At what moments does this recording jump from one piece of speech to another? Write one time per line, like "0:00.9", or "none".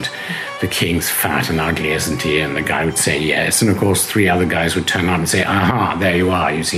none